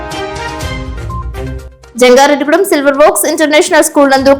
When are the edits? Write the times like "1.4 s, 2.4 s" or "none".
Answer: 1.5 s